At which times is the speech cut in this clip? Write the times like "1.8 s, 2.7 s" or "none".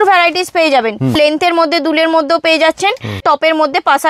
1.2 s, 3.2 s